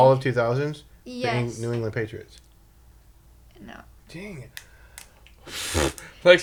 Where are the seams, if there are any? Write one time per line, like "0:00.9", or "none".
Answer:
none